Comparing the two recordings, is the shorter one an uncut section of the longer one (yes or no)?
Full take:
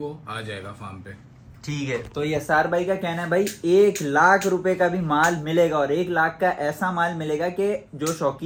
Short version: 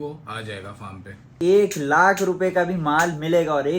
no